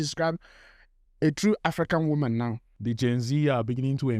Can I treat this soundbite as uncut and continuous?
no; 1 cut; at 2.8 s

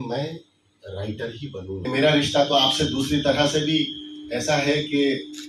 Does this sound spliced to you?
yes; 1 cut; at 1.8 s

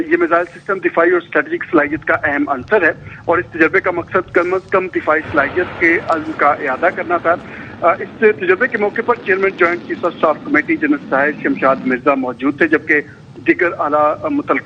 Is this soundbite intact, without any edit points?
yes; 0 cuts

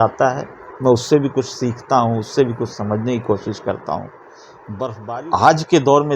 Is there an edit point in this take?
yes; 1 cut; at 5.0 s

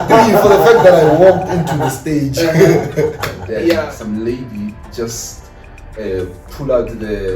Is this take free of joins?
no; 1 cut; at 3.9 s

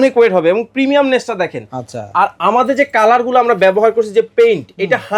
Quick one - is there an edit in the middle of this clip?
no; 0 cuts

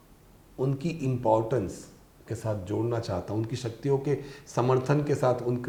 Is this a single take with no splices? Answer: yes; 0 cuts

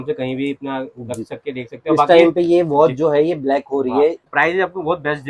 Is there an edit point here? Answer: yes; 1 cut; at 4.2 s

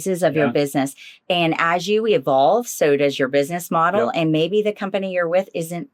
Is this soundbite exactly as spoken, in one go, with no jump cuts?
yes; 0 cuts

